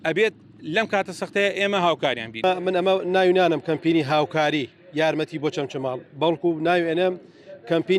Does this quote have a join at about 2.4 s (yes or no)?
yes